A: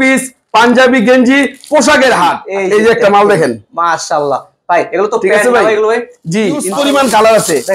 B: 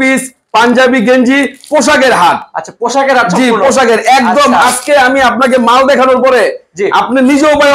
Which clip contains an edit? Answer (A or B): A